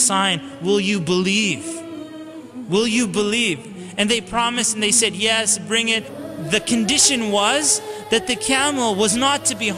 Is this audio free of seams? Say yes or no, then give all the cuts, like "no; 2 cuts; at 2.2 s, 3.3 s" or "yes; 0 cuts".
no; 1 cut; at 6.1 s